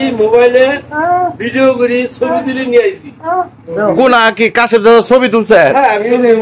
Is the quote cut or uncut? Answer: cut